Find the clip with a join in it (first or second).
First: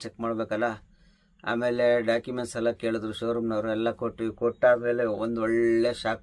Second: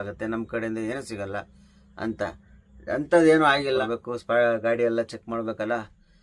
second